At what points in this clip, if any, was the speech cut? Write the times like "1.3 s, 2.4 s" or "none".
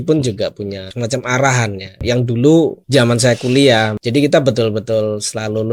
0.9 s, 2.0 s, 2.8 s, 4.0 s